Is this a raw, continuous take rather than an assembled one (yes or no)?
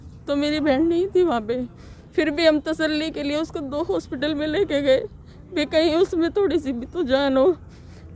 yes